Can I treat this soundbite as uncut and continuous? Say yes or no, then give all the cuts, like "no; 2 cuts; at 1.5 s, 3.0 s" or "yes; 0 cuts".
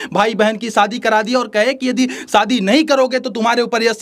yes; 0 cuts